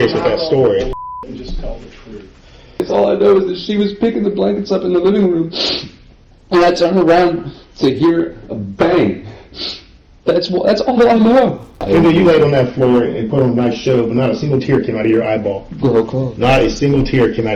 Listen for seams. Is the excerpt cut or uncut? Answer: cut